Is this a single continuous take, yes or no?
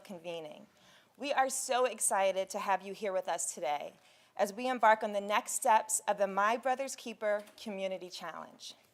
yes